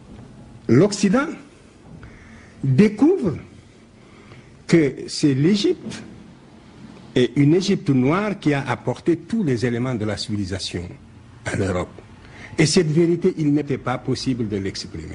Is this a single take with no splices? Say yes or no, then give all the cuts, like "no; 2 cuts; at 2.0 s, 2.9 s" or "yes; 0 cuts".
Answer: yes; 0 cuts